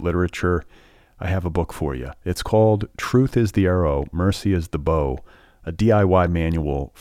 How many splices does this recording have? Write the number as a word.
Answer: zero